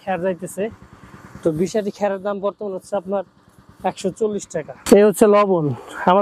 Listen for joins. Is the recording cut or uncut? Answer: cut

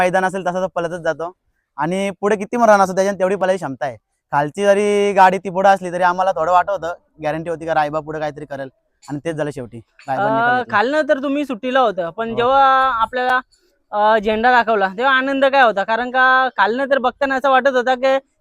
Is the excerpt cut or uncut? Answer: uncut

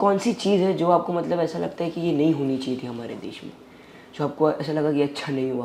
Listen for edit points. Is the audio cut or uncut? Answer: uncut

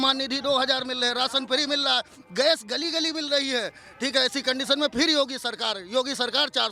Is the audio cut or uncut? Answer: uncut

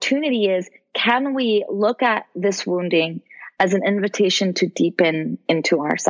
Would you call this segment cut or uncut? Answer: uncut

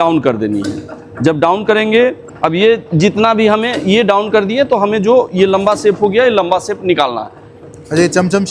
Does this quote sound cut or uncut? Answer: cut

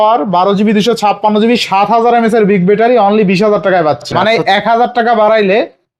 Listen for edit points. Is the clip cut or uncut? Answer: cut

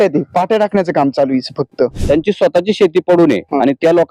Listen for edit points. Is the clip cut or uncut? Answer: cut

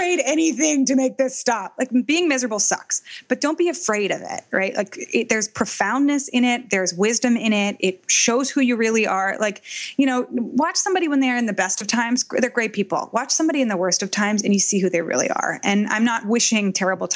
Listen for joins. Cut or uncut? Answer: uncut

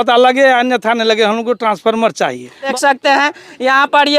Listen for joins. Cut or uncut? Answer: cut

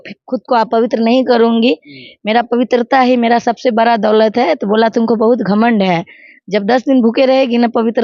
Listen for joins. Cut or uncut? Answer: uncut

